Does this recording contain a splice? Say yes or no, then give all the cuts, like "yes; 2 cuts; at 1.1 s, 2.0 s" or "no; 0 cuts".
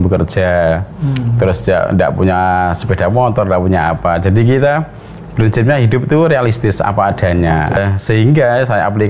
yes; 1 cut; at 7.8 s